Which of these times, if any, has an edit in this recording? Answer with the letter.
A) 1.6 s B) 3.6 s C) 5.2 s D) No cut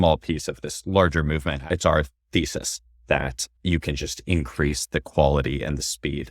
A